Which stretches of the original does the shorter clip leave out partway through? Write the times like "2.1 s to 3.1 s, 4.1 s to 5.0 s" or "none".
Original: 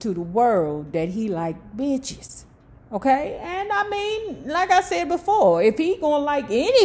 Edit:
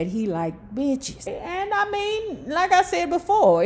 2.4 s to 3.3 s